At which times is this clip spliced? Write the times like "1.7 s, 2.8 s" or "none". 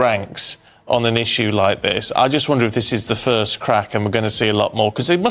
none